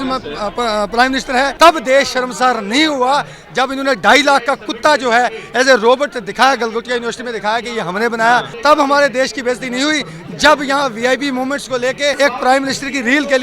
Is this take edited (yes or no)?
yes